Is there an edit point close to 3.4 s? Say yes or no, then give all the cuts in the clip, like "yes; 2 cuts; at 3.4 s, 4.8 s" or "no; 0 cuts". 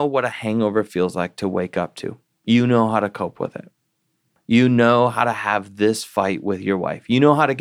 no; 0 cuts